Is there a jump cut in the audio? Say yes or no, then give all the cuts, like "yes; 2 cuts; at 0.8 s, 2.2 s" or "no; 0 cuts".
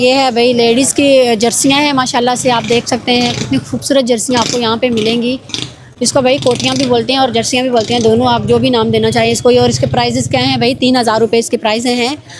no; 0 cuts